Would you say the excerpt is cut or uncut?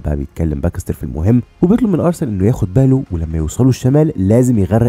uncut